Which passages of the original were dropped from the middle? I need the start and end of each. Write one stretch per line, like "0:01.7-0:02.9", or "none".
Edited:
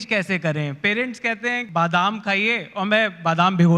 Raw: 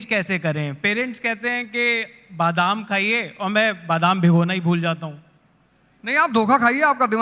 0:01.6-0:02.3